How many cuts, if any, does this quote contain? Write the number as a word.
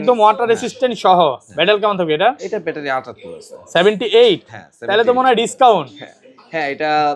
zero